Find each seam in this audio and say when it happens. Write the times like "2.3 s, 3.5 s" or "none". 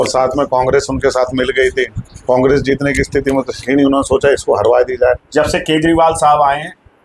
5.2 s